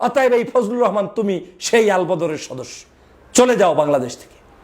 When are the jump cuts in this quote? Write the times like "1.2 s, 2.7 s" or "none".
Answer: none